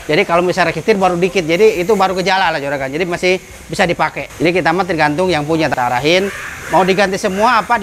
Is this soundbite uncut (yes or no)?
no